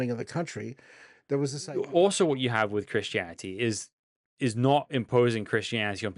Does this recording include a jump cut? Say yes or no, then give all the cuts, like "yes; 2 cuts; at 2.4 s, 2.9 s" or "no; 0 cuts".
yes; 1 cut; at 1.6 s